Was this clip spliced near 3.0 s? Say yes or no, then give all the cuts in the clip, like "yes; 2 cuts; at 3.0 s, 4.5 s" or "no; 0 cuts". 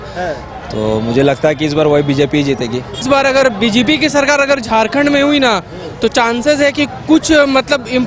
yes; 1 cut; at 3.0 s